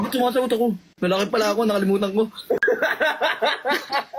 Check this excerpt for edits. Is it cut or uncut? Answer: uncut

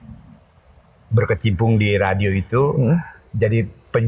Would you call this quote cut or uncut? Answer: uncut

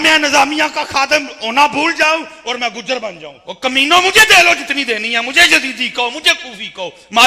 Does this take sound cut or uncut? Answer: cut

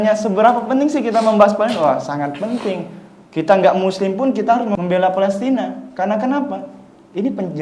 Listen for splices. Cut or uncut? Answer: cut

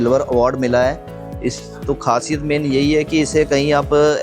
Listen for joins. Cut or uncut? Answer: uncut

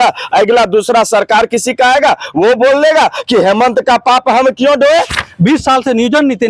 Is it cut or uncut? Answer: cut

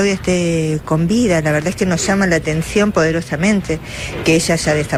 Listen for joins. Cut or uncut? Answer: uncut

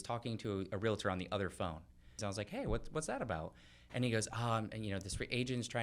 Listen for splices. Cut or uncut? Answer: cut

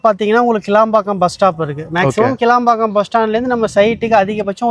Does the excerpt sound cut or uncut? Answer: uncut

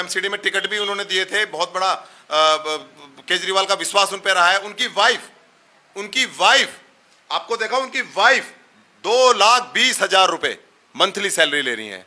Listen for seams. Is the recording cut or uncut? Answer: uncut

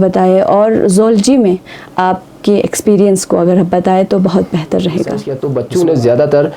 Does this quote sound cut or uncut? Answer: cut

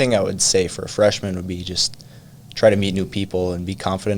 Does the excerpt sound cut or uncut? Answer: uncut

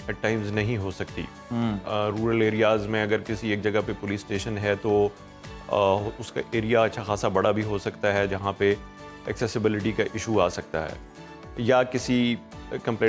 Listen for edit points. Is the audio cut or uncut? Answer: uncut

